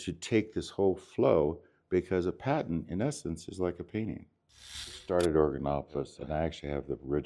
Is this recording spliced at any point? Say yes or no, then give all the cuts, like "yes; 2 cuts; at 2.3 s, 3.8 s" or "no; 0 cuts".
yes; 2 cuts; at 5.0 s, 6.2 s